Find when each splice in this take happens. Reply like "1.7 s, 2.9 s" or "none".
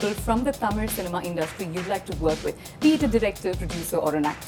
none